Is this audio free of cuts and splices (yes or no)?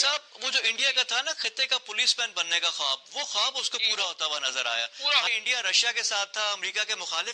no